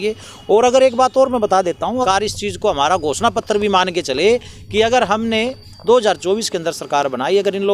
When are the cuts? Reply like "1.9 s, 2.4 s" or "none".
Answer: 2.0 s